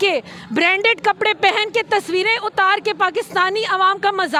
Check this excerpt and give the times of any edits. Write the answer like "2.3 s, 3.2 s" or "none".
none